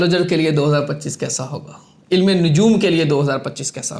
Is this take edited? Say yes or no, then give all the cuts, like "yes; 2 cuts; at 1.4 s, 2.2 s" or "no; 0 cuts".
no; 0 cuts